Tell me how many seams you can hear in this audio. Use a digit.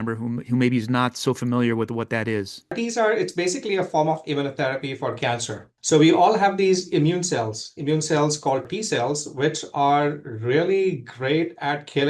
3